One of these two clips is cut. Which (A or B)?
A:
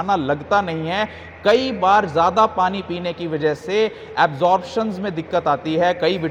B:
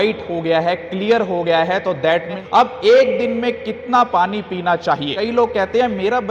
B